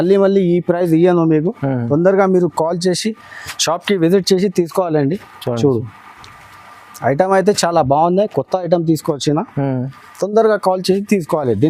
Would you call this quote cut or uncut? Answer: uncut